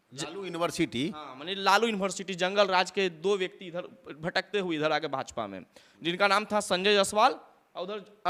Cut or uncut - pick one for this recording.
uncut